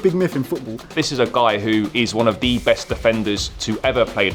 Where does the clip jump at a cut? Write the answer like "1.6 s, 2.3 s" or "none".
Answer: 0.9 s